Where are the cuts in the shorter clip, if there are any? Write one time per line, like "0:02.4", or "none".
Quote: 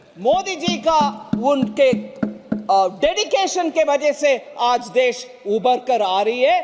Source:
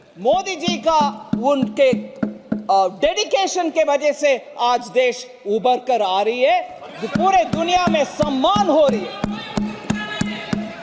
none

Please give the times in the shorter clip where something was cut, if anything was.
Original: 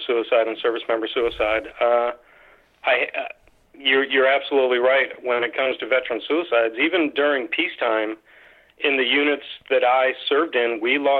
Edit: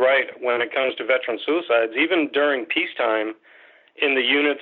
none

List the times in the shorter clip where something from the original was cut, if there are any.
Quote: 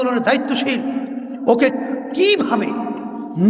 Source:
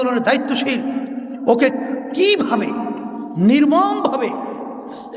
none

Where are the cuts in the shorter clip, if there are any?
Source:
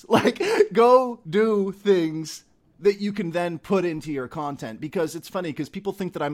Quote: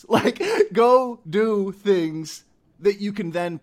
none

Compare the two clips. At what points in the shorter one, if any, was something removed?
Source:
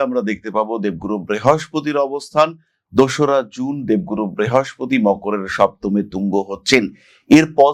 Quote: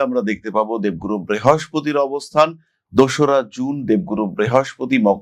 none

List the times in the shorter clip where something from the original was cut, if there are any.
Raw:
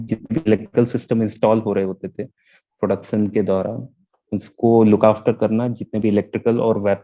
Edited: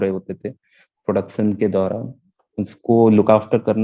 none

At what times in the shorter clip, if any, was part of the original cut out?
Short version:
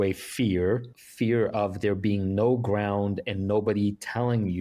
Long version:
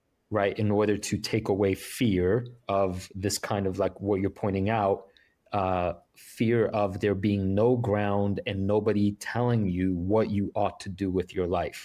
0:00.9

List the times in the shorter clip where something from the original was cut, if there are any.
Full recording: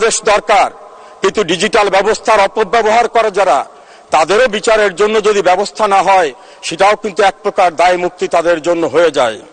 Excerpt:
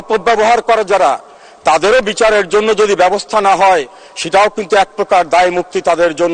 none

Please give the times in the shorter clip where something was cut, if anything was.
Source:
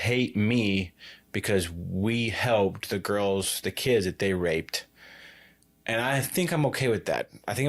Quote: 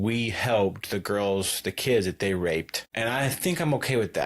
0:02.8

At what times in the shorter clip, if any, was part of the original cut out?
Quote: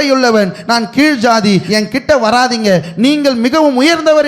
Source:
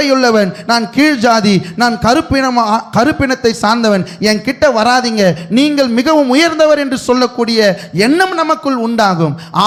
0:01.7

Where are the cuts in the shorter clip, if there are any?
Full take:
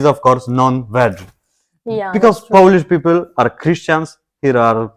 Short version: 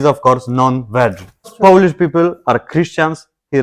0:01.5

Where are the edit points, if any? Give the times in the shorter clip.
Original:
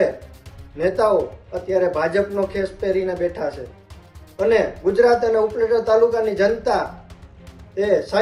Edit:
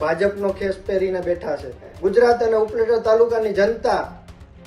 0:01.9

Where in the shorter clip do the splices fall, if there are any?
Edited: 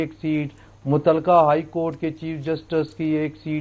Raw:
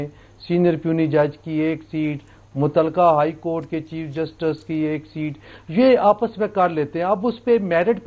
none

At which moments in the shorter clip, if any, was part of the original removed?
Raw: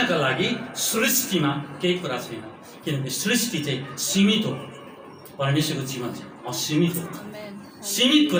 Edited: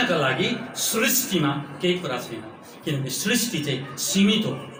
none

